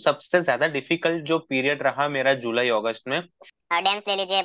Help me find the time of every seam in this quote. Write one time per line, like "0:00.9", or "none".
0:03.5